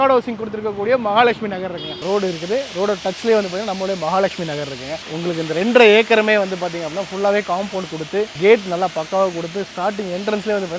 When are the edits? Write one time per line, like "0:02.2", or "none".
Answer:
0:02.0
0:05.0